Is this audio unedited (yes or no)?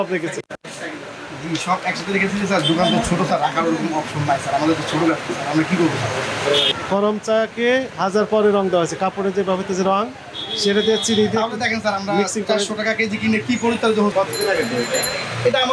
no